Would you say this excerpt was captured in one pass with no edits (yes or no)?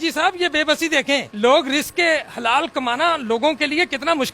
no